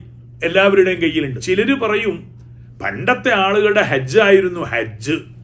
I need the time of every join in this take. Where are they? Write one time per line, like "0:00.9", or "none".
0:01.4